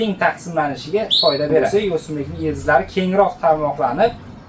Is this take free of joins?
no; 1 cut; at 1.7 s

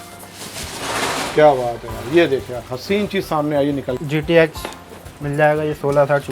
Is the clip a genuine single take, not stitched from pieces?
no; 1 cut; at 4.0 s

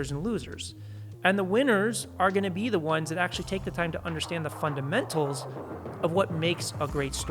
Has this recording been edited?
no; 0 cuts

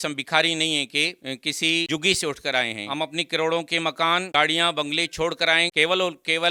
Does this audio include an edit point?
no; 0 cuts

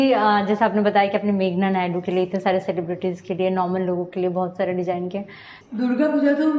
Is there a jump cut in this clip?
yes; 1 cut; at 5.6 s

